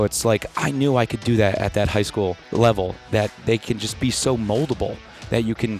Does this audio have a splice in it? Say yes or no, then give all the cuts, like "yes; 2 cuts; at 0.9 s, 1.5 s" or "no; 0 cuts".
yes; 1 cut; at 2.4 s